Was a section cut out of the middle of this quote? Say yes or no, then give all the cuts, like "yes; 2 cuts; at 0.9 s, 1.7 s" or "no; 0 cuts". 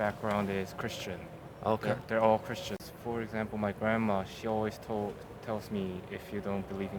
yes; 1 cut; at 2.8 s